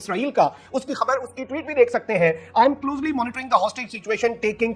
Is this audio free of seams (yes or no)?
yes